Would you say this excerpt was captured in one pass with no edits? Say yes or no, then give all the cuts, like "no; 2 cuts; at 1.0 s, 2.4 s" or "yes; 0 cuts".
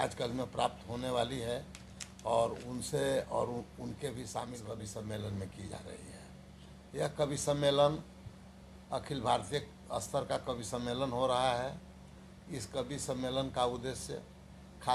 no; 1 cut; at 4.7 s